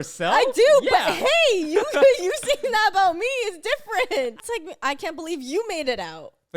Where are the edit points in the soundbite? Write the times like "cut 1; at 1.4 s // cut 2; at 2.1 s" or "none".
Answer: cut 1; at 4.4 s